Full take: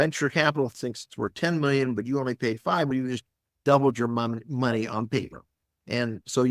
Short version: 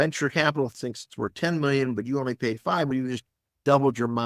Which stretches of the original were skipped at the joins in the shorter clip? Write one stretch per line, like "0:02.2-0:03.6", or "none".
none

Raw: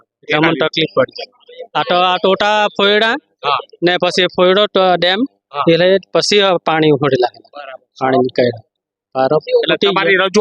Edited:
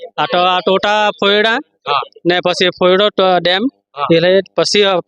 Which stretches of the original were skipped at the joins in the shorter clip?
none

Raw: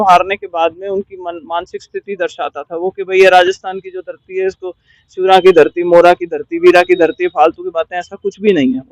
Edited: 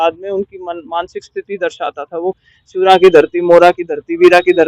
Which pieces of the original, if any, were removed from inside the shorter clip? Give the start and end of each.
0:02.9-0:04.8

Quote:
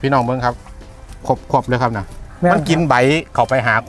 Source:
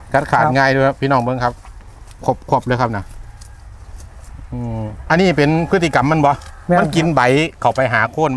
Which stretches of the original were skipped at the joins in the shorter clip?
0:03.2-0:06.5

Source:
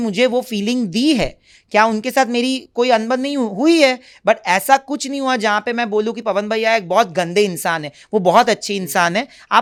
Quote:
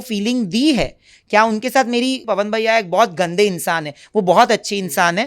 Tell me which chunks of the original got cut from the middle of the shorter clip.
0:02.6-0:06.2

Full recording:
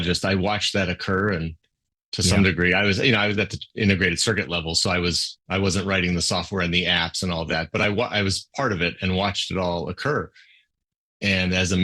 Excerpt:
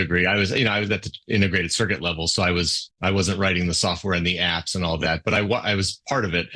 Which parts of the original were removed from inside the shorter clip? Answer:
none

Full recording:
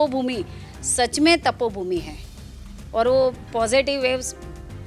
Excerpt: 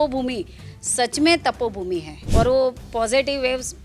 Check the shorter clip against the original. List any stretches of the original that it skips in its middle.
0:02.2-0:02.8

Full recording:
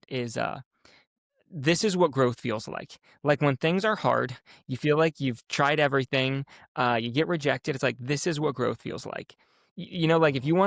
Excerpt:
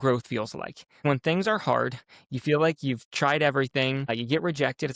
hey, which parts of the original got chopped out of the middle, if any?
0:03.1-0:03.4
0:06.5-0:07.0

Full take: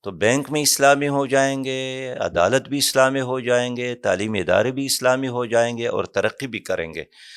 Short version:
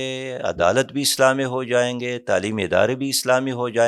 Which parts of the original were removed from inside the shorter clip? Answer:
none

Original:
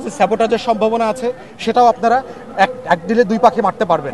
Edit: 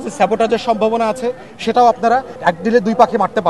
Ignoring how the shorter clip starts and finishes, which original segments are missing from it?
0:02.3-0:02.8

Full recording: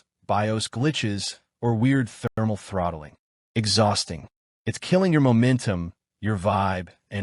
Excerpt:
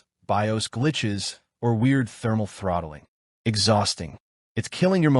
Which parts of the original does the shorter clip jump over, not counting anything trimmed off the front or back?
0:02.3-0:02.4

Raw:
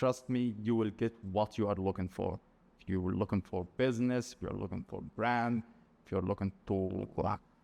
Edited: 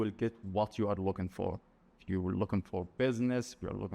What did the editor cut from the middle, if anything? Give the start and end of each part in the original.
none

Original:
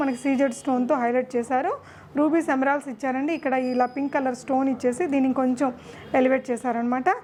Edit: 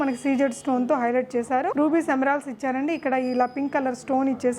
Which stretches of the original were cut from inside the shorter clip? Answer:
0:01.7-0:02.1

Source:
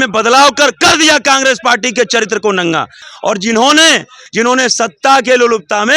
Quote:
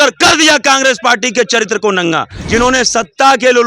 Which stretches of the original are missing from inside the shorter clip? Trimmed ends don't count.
0:02.9-0:04.2

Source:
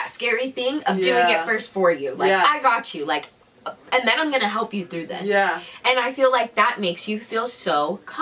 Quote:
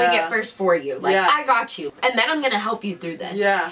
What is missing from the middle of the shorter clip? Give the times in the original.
0:03.0-0:03.7

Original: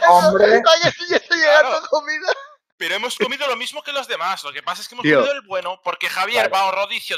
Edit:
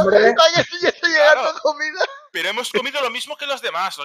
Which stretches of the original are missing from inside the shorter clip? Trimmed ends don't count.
0:02.5-0:02.7

